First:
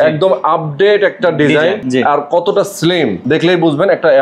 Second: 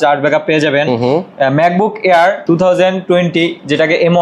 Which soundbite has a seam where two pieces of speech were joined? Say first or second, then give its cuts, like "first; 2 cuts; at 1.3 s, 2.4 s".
first; 2 cuts; at 1.8 s, 3.2 s